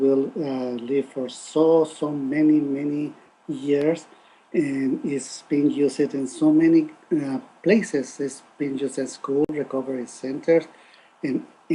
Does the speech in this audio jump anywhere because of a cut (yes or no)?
no